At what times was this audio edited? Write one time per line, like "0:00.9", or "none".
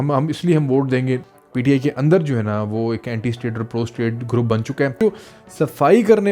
0:01.2
0:05.0